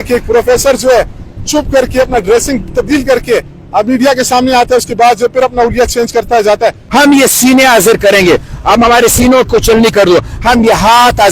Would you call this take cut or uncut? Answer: cut